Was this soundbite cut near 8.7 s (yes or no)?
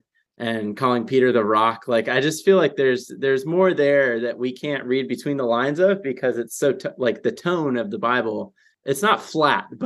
yes